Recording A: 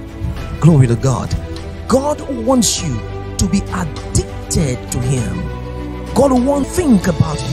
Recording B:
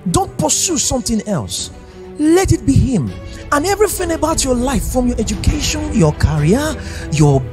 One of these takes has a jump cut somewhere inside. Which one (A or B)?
A